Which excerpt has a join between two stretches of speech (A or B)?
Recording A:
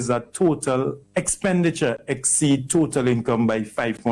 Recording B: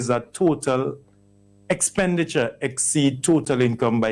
A